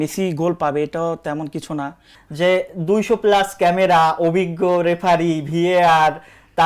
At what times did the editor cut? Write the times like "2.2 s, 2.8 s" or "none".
2.2 s